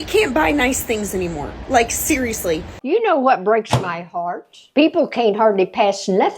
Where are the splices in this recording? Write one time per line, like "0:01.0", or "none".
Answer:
0:02.7